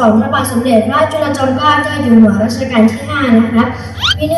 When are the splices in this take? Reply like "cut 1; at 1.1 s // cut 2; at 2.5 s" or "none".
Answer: none